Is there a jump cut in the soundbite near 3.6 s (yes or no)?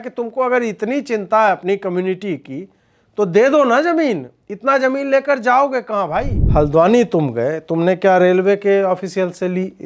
no